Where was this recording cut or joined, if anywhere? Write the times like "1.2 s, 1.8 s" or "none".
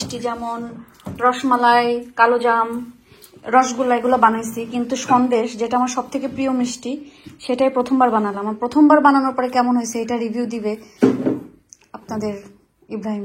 none